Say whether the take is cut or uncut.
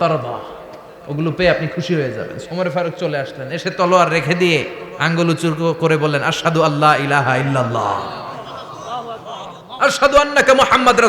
cut